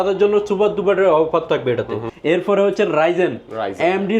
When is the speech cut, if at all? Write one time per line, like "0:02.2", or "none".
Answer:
0:02.0